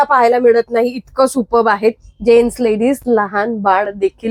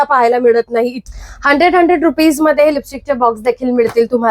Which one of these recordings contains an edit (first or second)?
second